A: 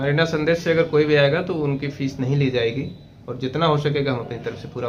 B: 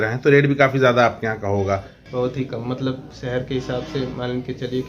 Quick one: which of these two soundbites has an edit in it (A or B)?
B